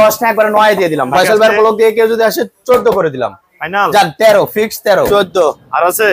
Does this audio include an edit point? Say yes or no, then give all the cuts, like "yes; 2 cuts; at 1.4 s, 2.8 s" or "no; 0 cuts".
yes; 2 cuts; at 1.1 s, 5.1 s